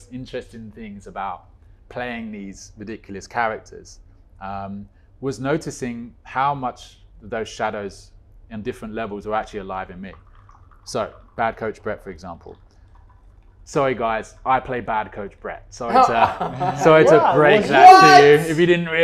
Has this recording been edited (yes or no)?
no